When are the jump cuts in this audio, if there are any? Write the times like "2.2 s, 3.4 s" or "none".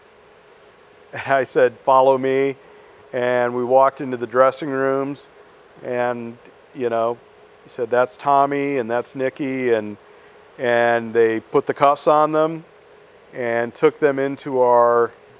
none